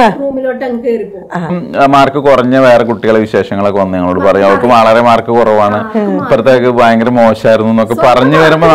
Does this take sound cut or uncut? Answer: cut